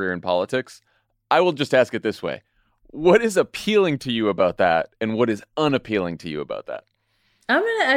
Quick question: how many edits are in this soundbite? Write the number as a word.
one